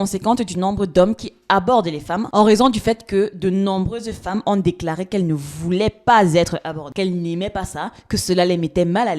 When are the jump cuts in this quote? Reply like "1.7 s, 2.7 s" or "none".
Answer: 2.3 s